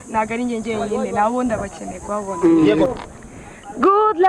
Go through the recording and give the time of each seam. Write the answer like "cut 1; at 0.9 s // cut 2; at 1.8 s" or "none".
cut 1; at 2.9 s